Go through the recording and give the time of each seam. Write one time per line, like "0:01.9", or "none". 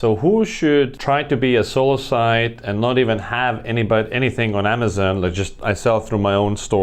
0:01.0

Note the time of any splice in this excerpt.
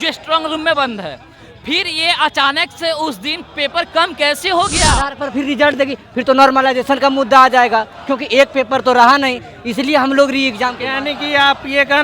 0:05.1

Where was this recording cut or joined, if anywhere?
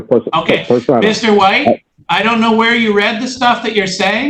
0:02.0

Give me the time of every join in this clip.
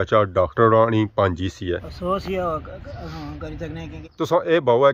0:01.9
0:04.0

